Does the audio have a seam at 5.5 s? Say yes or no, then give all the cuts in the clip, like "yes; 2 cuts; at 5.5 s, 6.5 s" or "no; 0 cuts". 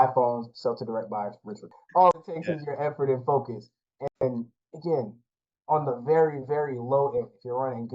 no; 1 cut; at 1.8 s